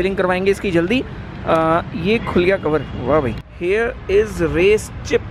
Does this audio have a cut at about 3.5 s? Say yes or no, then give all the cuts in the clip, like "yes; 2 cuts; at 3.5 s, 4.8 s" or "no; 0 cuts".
yes; 1 cut; at 3.5 s